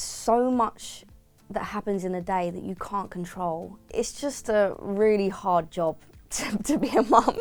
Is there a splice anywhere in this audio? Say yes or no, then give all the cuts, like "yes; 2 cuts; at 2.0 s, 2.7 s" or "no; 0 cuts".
no; 0 cuts